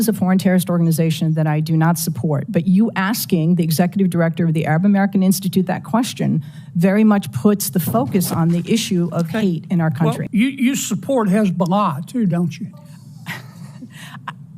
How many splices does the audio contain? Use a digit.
1